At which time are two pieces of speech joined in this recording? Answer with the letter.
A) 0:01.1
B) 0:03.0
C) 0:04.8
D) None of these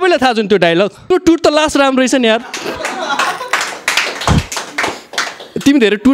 A